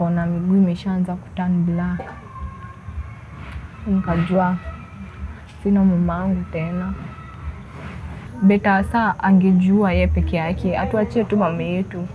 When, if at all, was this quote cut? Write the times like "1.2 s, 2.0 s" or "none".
8.2 s